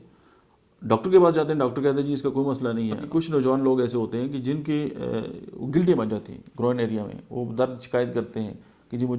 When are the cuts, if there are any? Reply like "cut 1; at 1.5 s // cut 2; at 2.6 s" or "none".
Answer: cut 1; at 3.0 s